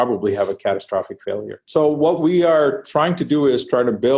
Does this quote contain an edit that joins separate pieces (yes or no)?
yes